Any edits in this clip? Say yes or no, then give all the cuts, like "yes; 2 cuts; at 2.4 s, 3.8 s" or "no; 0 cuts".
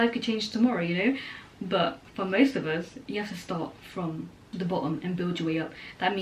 no; 0 cuts